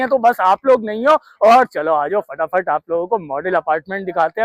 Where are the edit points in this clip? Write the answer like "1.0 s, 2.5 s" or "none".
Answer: none